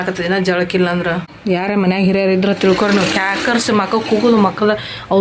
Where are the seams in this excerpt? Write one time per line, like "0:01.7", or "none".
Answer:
0:01.3